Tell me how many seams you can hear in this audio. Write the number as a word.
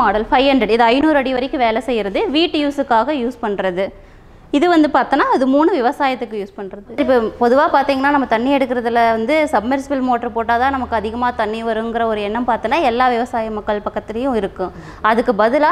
one